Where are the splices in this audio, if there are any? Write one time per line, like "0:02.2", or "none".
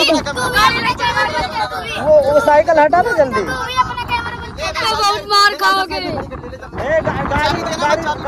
none